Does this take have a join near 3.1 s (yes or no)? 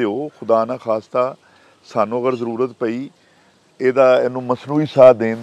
no